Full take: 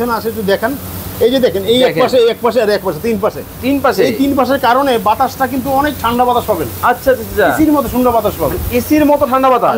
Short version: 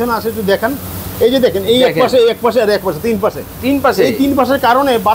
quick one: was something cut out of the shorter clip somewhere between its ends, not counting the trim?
no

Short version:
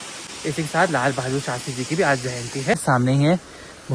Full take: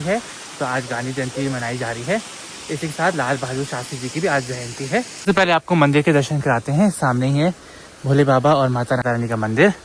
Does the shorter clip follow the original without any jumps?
no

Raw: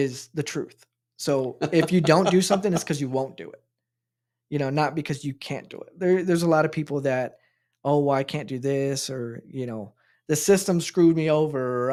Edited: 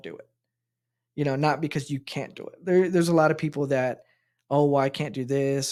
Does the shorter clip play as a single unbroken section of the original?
yes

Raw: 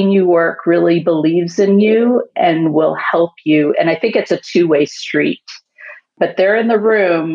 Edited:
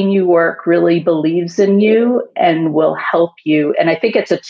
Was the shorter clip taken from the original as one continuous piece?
yes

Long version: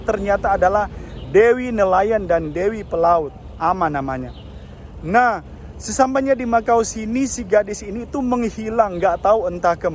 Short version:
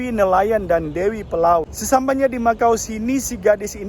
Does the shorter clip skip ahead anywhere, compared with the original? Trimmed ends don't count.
yes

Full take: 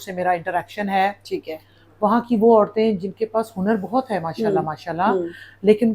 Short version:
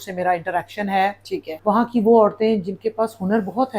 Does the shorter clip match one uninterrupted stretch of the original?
no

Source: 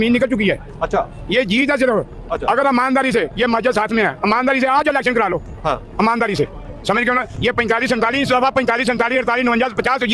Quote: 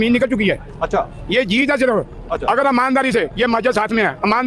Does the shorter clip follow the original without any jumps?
yes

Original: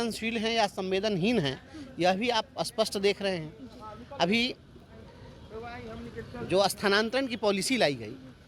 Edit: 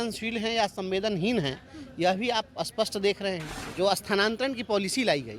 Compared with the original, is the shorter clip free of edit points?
no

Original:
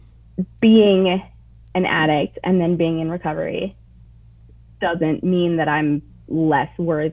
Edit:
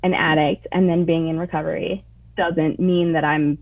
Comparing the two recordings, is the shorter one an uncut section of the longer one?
no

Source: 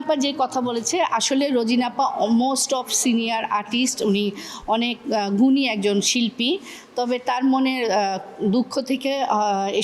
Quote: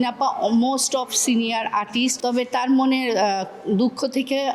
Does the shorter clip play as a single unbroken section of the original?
no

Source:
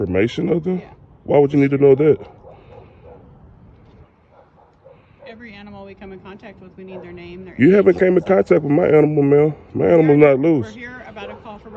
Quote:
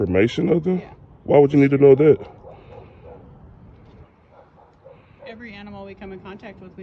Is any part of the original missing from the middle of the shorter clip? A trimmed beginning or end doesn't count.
no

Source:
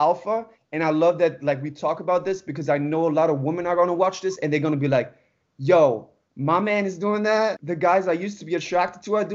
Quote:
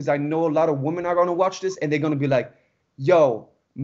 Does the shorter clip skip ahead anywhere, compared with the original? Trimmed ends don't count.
no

